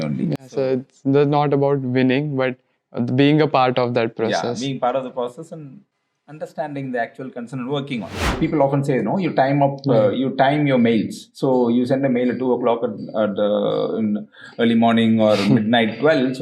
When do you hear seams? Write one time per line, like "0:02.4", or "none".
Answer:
0:08.4